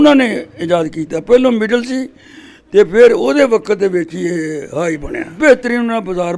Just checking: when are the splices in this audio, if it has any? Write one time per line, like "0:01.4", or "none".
0:05.3